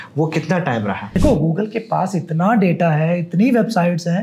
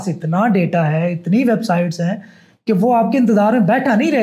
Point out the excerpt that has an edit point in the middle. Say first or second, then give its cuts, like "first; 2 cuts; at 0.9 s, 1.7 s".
first; 1 cut; at 1.1 s